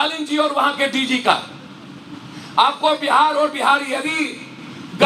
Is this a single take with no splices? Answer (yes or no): yes